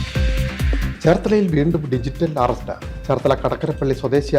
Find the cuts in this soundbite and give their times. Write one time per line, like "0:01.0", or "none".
0:00.9